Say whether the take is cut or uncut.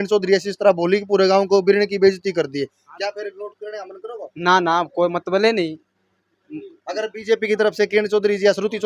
uncut